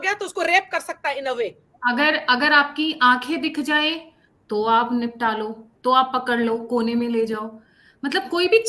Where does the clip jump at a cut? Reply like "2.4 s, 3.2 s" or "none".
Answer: 1.6 s